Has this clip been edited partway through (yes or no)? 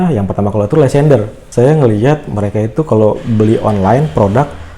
yes